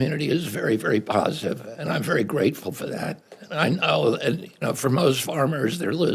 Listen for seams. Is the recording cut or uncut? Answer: uncut